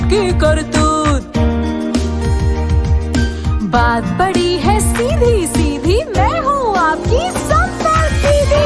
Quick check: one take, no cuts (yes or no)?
yes